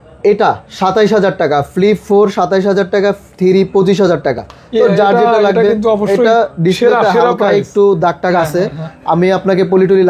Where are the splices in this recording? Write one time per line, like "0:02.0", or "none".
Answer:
none

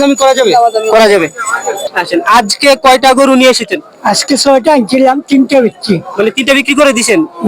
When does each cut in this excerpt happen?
0:01.8

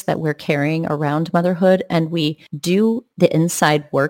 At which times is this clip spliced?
0:02.8

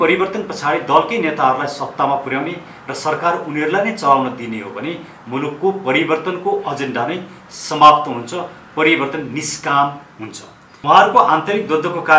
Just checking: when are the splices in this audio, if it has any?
0:10.7

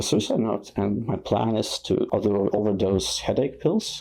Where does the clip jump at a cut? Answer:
0:02.1

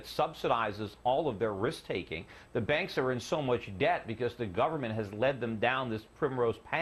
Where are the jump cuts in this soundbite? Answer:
none

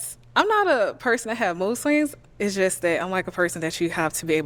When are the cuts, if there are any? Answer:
none

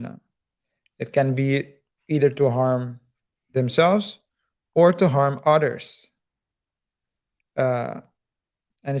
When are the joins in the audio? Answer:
none

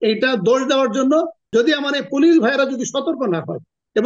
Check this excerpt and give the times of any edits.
0:01.4

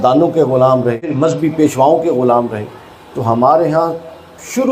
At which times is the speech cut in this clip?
0:01.1

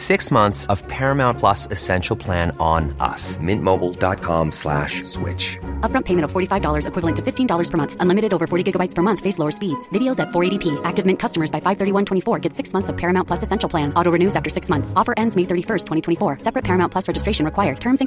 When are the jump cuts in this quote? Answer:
none

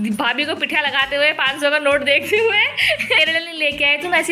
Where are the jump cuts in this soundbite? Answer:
0:03.2

